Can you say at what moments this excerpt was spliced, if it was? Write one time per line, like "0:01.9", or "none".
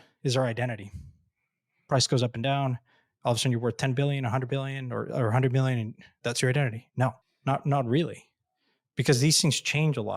0:07.3